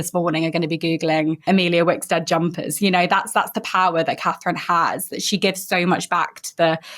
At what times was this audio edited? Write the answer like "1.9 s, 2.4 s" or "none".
1.4 s